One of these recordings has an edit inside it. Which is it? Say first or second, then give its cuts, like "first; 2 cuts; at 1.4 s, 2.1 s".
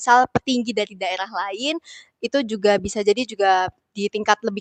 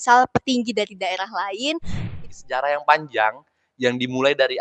second; 1 cut; at 2.2 s